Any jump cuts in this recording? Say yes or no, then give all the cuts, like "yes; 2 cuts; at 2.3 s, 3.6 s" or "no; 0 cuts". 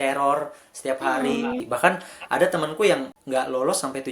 yes; 2 cuts; at 1.6 s, 3.1 s